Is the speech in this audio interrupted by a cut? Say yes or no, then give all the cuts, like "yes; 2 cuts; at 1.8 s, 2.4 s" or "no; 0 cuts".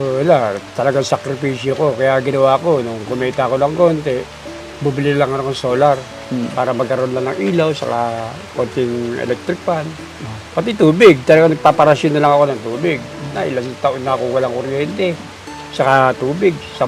yes; 1 cut; at 13.3 s